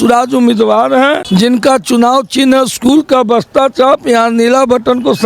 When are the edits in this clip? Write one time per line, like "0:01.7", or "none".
0:01.2